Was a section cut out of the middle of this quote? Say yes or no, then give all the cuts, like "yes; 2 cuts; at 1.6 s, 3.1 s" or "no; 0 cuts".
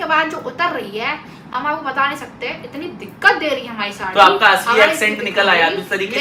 no; 0 cuts